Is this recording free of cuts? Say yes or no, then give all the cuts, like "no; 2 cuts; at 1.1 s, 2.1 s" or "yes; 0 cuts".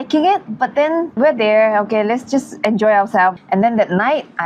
no; 2 cuts; at 1.2 s, 3.3 s